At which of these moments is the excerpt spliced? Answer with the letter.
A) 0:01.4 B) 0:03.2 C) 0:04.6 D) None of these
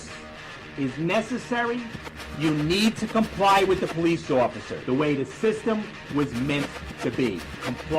C